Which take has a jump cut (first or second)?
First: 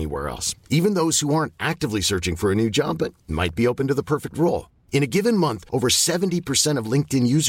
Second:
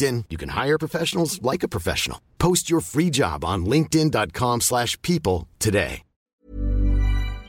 second